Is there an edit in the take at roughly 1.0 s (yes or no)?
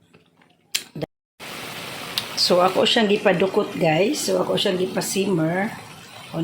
yes